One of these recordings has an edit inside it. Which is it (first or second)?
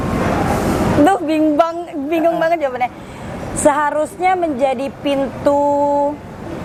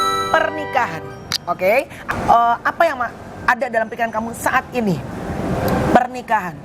second